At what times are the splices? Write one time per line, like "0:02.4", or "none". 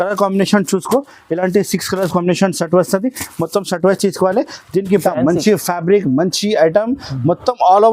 0:05.0